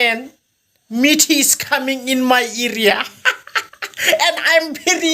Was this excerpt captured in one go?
yes; 0 cuts

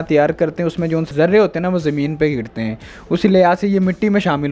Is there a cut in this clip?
yes; 1 cut; at 1.1 s

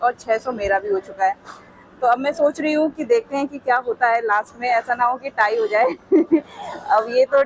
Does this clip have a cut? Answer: no; 0 cuts

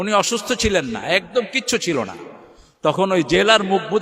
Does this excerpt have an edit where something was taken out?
no; 0 cuts

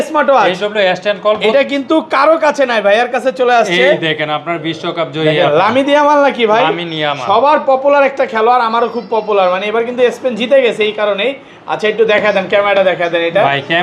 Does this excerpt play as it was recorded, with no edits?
yes; 0 cuts

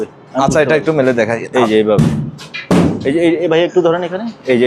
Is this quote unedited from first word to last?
yes; 0 cuts

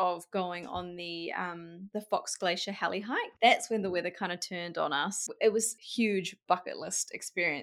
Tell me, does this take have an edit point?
yes; 4 cuts; at 1.8 s, 3.3 s, 5.2 s, 5.8 s

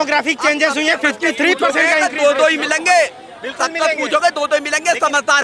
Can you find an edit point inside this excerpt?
no; 0 cuts

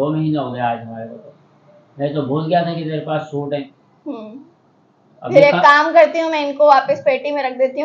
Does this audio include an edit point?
no; 0 cuts

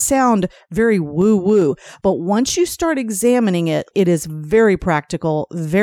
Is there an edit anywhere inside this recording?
yes; 2 cuts; at 1.9 s, 3.9 s

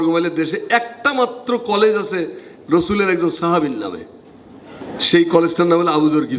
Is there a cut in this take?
no; 0 cuts

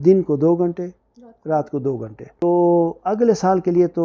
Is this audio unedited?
no; 1 cut; at 2.4 s

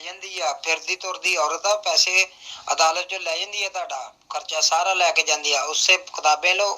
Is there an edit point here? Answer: no; 0 cuts

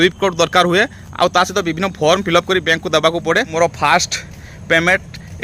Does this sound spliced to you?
yes; 1 cut; at 3.5 s

